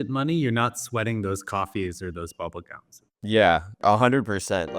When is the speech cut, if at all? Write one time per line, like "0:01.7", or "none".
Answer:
0:03.8